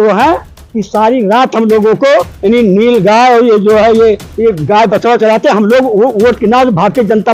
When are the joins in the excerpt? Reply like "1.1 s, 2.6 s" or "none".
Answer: none